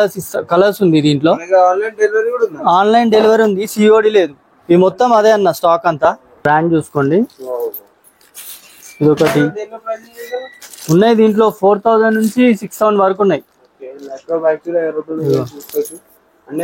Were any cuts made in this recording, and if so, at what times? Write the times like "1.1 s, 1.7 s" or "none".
6.3 s